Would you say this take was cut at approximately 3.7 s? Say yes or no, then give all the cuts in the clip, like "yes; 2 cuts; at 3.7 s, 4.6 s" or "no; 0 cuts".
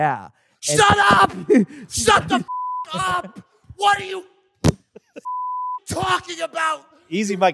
no; 0 cuts